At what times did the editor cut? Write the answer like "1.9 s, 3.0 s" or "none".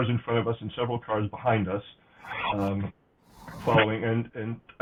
none